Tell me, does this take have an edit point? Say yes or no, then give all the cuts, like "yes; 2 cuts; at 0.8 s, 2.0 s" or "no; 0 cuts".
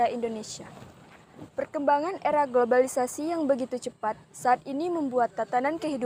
no; 0 cuts